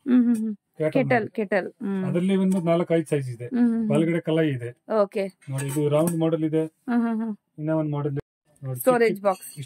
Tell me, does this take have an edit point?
yes; 1 cut; at 8.3 s

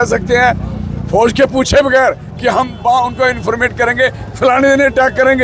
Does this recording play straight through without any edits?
yes; 0 cuts

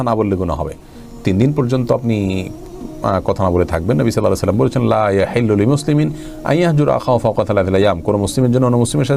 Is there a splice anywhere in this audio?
no; 0 cuts

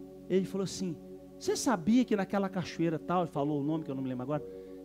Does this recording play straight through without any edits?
yes; 0 cuts

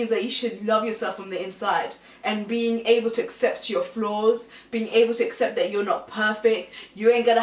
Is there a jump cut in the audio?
no; 0 cuts

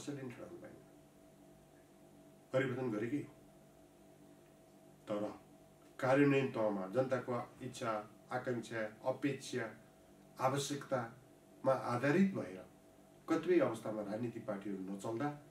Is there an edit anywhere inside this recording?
no; 0 cuts

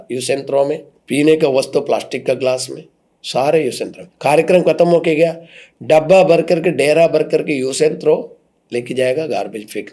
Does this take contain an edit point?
yes; 1 cut; at 0.9 s

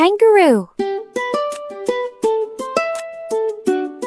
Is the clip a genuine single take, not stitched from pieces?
yes; 0 cuts

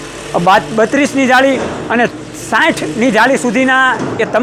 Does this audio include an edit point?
no; 0 cuts

